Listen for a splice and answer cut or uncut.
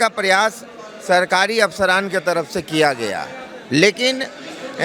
uncut